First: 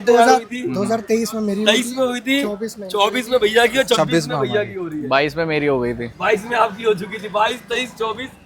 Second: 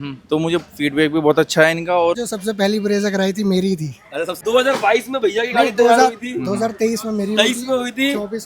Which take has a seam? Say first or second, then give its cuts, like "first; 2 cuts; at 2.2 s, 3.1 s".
second; 2 cuts; at 2.2 s, 4.3 s